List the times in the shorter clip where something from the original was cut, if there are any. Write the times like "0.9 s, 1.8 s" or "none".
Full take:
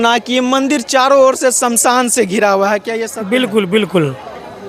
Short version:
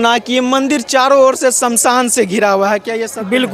none